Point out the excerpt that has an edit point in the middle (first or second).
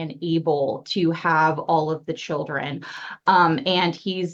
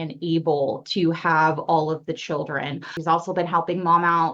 second